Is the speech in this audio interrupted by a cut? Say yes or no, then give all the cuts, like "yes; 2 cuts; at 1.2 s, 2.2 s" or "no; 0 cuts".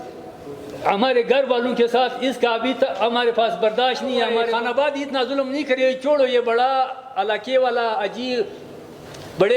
yes; 1 cut; at 4.3 s